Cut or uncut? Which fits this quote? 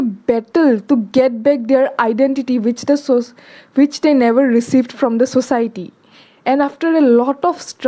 uncut